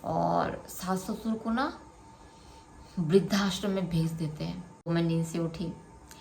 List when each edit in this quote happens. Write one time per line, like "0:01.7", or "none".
0:04.8

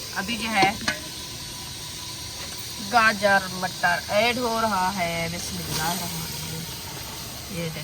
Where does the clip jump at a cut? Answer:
none

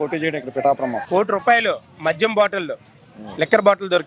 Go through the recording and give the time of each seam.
0:01.0

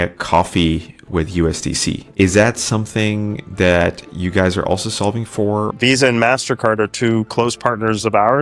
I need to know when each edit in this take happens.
0:02.1
0:05.7

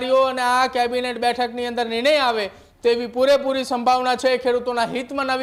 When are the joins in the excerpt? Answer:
none

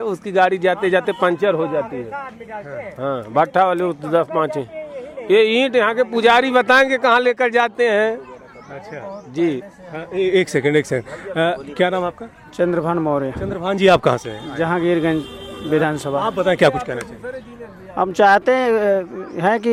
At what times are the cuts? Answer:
none

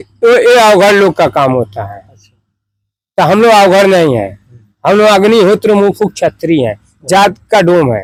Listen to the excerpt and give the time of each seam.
none

